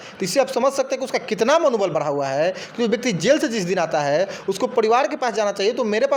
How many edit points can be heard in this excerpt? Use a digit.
0